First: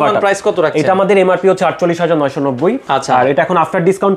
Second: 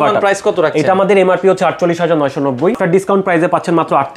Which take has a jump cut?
second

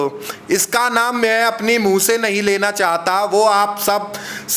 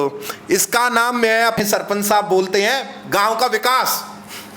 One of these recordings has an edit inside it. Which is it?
second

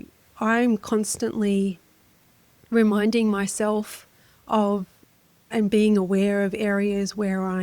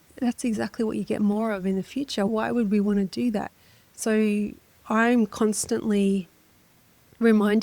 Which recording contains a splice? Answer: second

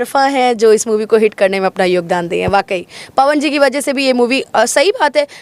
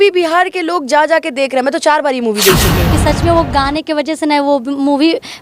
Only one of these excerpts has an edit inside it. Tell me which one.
second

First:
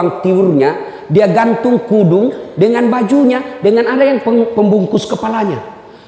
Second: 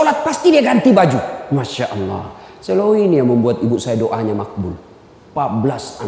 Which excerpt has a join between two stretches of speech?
second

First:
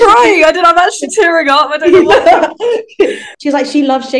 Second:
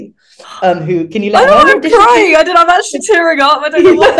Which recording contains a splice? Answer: first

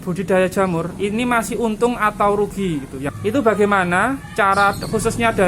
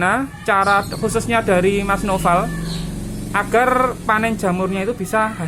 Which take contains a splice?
first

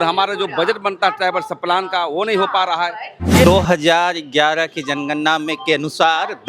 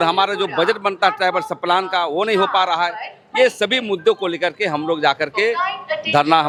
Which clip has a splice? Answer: first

